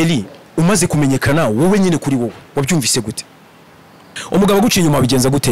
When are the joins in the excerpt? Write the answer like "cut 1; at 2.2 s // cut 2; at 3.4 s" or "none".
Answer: cut 1; at 4.1 s